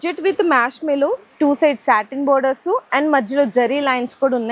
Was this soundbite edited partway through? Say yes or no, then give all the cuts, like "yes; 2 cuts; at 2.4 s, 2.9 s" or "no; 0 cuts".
no; 0 cuts